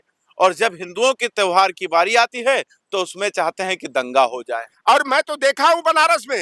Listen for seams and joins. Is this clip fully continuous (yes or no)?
yes